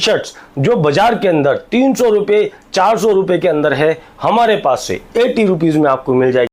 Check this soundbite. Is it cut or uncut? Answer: uncut